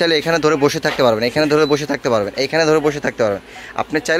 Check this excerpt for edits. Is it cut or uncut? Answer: uncut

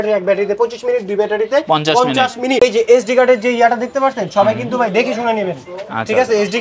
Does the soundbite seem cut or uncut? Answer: cut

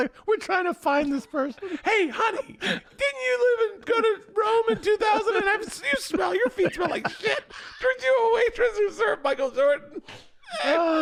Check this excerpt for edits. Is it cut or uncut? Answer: uncut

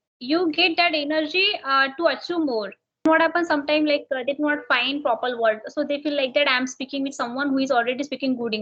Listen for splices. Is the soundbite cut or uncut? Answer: cut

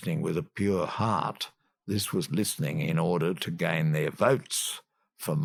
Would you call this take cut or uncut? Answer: uncut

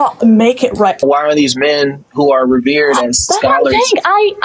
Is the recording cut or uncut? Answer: cut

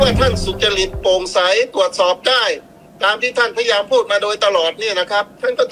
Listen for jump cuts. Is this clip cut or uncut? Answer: uncut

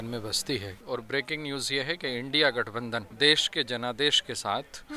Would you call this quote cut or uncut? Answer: cut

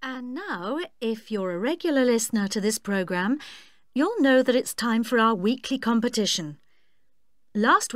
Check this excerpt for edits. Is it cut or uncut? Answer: cut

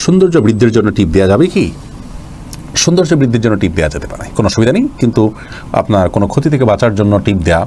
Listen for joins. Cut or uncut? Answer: uncut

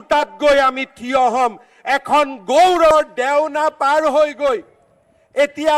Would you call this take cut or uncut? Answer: cut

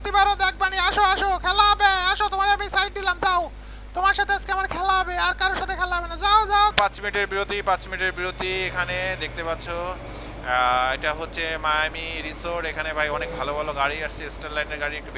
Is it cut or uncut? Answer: cut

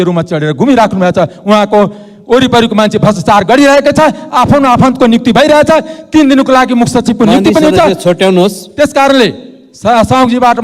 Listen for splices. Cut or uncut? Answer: uncut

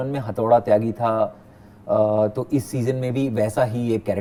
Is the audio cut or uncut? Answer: uncut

